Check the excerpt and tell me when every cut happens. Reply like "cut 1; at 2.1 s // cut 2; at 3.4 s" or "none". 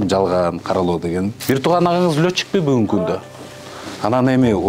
cut 1; at 1.4 s